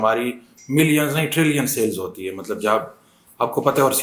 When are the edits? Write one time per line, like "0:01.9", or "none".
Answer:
none